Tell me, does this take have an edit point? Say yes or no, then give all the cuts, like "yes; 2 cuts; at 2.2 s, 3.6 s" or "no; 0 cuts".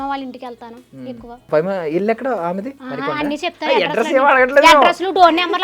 yes; 2 cuts; at 1.5 s, 2.8 s